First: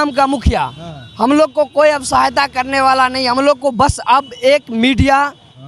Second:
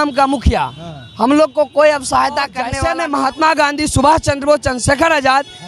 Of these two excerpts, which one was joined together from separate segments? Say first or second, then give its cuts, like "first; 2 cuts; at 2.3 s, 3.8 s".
second; 1 cut; at 2.6 s